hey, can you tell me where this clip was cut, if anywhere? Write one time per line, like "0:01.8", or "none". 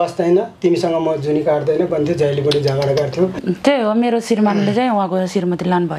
0:03.3